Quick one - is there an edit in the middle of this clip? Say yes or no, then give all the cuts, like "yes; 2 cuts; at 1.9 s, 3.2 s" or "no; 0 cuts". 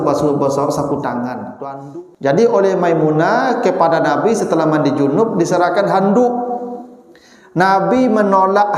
yes; 1 cut; at 1.5 s